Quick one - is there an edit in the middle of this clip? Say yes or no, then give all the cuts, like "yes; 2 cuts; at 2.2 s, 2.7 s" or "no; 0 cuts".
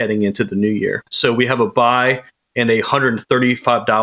yes; 1 cut; at 1.1 s